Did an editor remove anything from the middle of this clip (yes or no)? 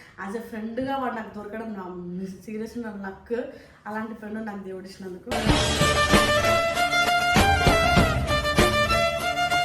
no